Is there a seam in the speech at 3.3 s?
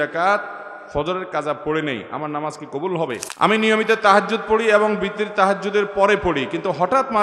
yes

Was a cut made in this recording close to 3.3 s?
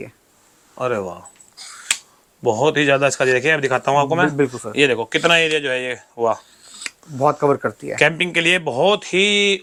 no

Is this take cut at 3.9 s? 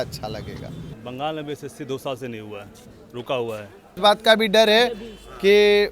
yes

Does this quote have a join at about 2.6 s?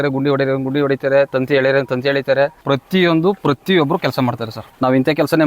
yes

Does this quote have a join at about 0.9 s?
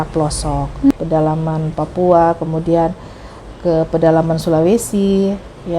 yes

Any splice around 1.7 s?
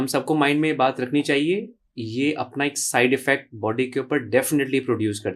no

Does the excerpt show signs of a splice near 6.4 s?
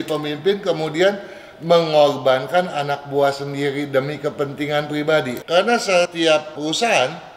yes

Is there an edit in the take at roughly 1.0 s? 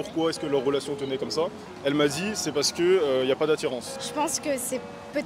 no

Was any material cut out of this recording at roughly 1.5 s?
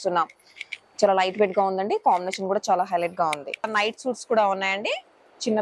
no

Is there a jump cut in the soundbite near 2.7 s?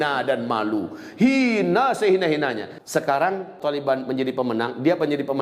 yes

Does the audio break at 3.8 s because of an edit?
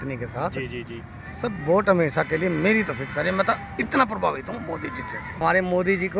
no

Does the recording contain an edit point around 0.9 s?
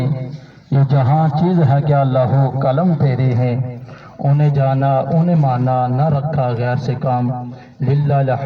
no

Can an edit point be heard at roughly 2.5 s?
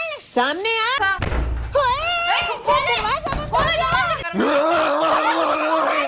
no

